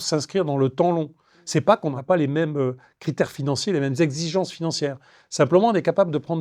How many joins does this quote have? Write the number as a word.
zero